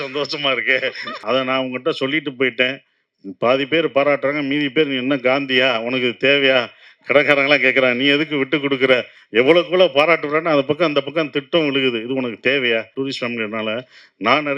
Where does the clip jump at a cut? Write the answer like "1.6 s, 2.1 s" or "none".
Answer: 1.1 s, 12.9 s